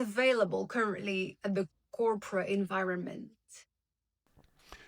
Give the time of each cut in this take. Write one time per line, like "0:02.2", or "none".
none